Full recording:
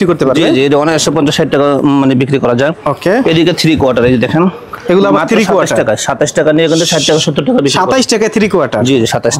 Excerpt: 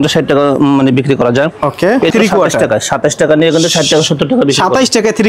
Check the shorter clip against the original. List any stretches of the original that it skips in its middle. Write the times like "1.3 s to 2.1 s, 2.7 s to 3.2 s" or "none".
3.3 s to 5.3 s